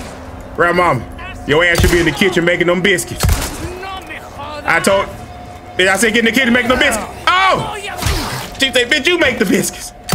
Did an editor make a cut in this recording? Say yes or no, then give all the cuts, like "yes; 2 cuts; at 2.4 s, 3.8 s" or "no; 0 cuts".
no; 0 cuts